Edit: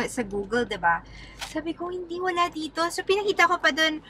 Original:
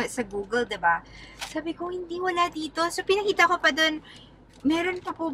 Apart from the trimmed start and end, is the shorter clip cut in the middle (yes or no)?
no